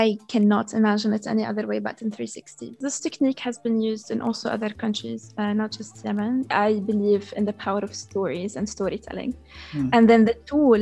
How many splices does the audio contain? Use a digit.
2